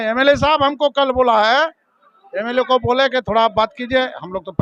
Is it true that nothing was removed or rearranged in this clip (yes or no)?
yes